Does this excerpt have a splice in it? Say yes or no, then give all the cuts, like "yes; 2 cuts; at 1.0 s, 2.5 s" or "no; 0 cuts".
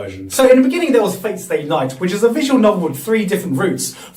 no; 0 cuts